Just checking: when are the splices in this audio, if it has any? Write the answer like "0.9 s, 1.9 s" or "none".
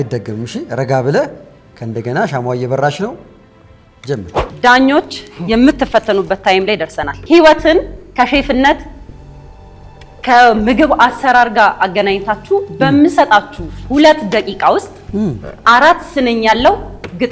4.5 s, 7.1 s